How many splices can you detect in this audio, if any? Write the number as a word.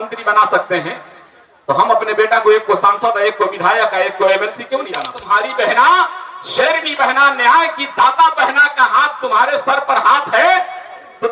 one